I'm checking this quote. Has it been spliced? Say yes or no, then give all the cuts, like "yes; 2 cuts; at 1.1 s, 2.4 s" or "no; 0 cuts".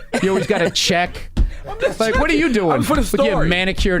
yes; 1 cut; at 1.5 s